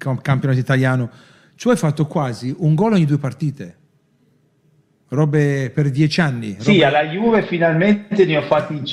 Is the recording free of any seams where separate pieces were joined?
yes; 0 cuts

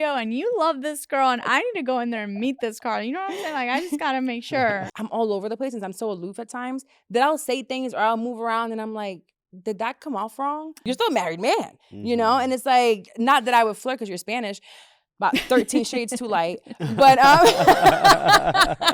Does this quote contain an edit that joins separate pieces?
yes; 2 cuts; at 4.9 s, 10.7 s

